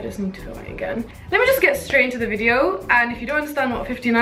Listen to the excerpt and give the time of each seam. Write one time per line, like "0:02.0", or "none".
none